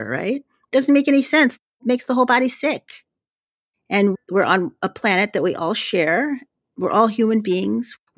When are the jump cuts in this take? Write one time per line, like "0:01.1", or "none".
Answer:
0:01.7
0:03.2